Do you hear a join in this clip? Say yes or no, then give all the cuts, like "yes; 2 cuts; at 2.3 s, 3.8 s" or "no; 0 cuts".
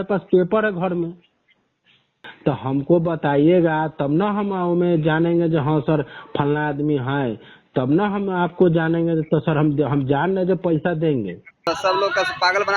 yes; 2 cuts; at 2.3 s, 11.6 s